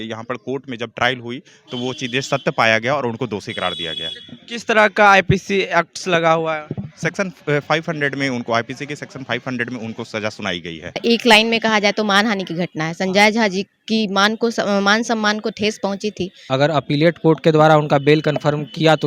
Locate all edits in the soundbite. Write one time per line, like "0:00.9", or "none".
0:11.0
0:16.5